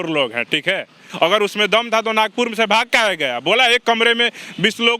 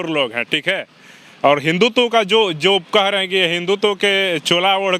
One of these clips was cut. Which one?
first; 1 cut; at 1.0 s

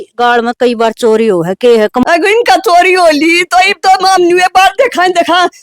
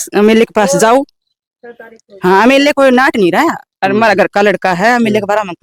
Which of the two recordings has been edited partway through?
first; 1 cut; at 2.0 s

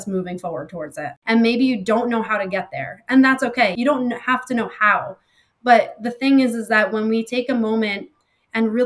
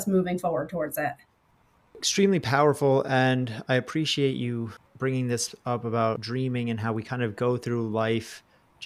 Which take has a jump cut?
first; 2 cuts; at 1.2 s, 3.7 s

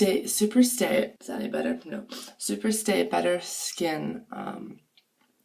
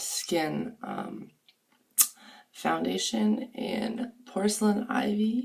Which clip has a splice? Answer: first; 1 cut; at 1.2 s

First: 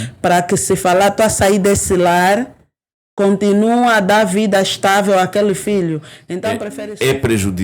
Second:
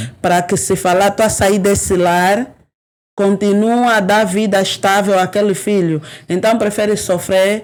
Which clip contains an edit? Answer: first; 1 cut; at 6.7 s

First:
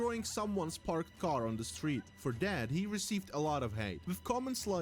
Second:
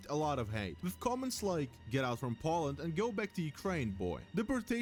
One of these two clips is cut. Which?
first; 1 cut; at 1.0 s

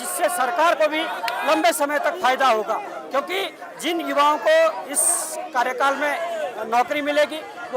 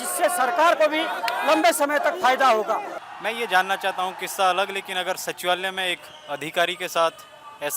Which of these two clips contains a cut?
second; 1 cut; at 3.0 s

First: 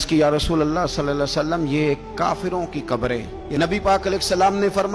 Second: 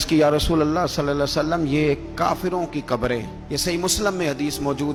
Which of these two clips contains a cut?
first; 1 cut; at 3.4 s

